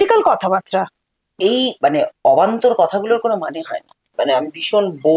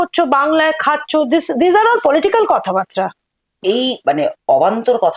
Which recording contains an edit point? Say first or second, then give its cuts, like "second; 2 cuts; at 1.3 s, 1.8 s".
first; 1 cut; at 4.1 s